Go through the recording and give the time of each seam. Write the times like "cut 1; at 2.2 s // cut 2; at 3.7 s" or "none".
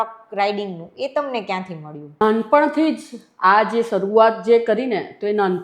cut 1; at 2.2 s